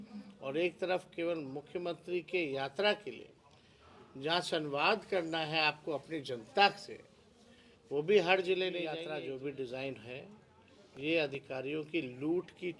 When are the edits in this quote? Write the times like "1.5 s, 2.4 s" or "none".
9.0 s

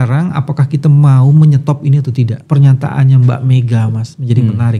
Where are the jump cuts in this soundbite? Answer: 2.4 s

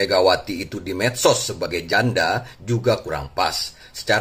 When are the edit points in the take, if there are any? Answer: none

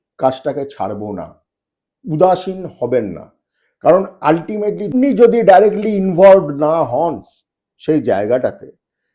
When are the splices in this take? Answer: 4.8 s

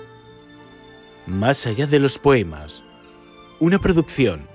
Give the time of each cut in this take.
1.2 s

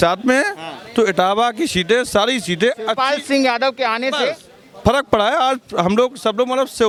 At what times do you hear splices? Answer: none

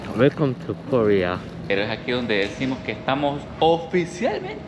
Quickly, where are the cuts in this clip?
1.7 s

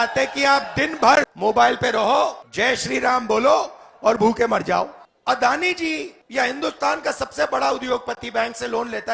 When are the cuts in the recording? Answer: 1.3 s, 2.4 s, 5.0 s, 6.2 s

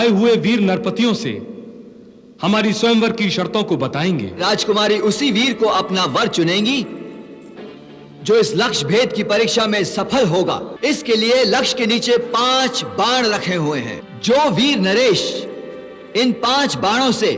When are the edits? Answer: 4.4 s, 10.7 s, 14.0 s

